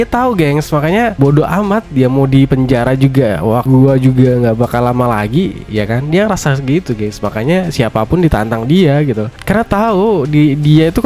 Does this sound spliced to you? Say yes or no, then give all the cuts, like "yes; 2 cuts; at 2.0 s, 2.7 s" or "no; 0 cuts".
yes; 1 cut; at 3.6 s